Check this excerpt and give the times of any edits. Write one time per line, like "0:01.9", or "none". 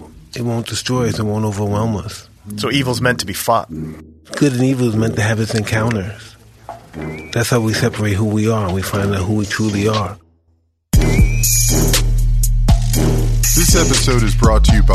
0:02.5
0:03.8
0:10.5